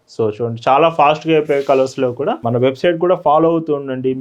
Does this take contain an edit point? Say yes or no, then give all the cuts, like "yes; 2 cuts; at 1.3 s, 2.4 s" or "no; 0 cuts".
yes; 1 cut; at 2.4 s